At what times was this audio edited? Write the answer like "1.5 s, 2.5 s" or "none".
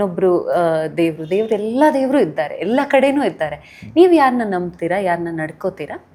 none